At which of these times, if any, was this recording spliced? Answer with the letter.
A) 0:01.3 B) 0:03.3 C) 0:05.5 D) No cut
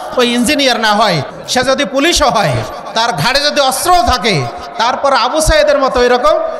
A